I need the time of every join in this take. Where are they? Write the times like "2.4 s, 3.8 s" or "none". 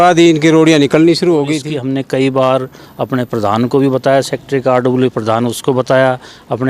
1.7 s